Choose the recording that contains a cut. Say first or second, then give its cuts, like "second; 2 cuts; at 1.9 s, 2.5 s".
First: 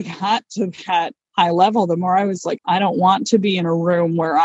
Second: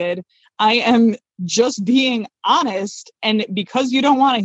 first; 2 cuts; at 1.2 s, 2.6 s